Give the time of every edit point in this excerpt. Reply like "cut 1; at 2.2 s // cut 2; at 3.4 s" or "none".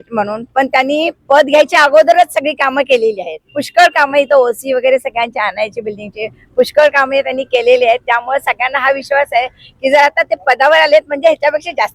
none